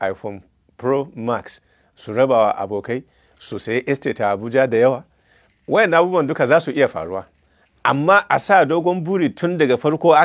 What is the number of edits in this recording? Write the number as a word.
zero